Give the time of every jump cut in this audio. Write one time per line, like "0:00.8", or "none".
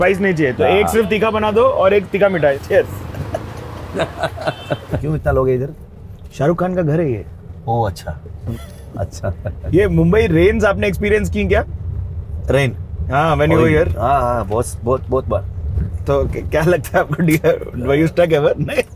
0:02.6
0:04.9
0:08.5
0:09.7